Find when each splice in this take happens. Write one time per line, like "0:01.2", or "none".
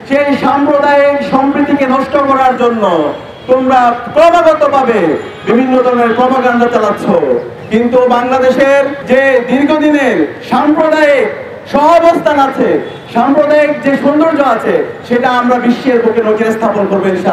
0:09.0